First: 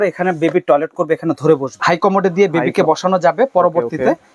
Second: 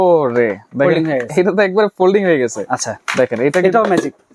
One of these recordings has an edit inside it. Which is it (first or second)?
first